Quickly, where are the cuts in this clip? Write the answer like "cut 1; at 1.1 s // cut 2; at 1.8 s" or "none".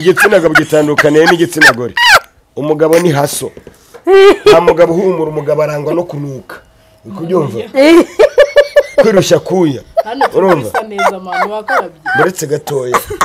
none